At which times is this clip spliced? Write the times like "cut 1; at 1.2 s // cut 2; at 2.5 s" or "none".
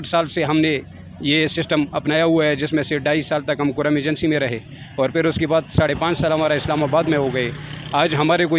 none